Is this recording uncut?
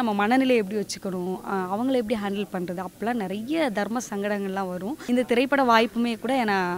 no; 1 cut; at 5.0 s

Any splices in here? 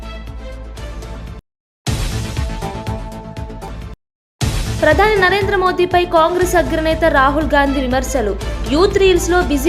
yes; 1 cut; at 1.2 s

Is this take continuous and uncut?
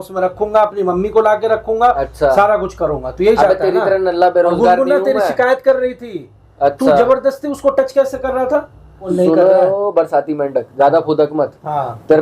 no; 1 cut; at 9.0 s

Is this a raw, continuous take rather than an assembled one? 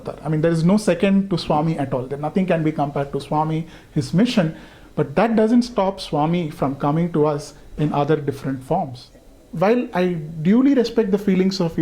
no; 1 cut; at 9.0 s

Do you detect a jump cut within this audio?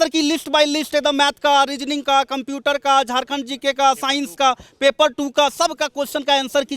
no; 0 cuts

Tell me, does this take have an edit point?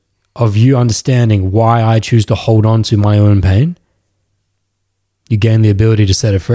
no; 0 cuts

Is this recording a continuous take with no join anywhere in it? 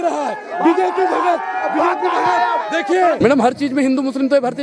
no; 1 cut; at 3.2 s

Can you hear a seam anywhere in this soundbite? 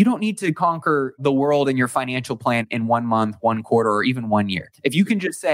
yes; 3 cuts; at 1.2 s, 2.7 s, 4.6 s

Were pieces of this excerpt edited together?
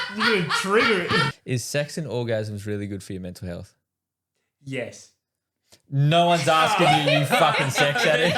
yes; 1 cut; at 1.4 s

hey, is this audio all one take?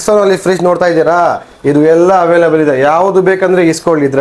yes; 0 cuts

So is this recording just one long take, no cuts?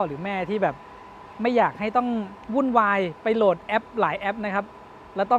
yes; 0 cuts

